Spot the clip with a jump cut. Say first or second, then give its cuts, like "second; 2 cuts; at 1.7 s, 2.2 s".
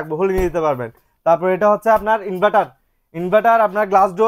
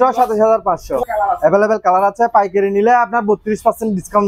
second; 1 cut; at 1.1 s